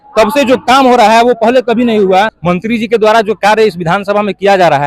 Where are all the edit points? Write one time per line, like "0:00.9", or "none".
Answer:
0:02.4